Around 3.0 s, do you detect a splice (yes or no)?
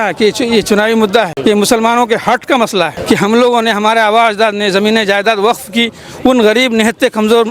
yes